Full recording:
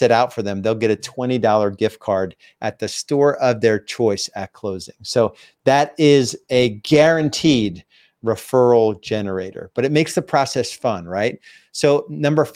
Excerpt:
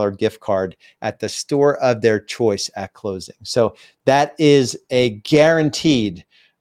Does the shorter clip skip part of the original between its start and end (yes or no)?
no